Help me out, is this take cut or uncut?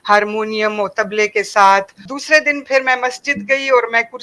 cut